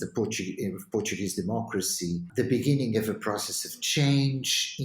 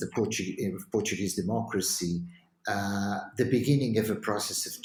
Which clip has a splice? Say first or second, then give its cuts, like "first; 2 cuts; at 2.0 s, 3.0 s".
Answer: first; 1 cut; at 2.3 s